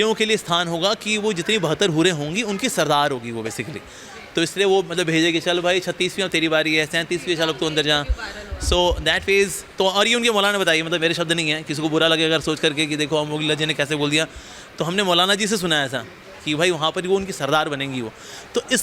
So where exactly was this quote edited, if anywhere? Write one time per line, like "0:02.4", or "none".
none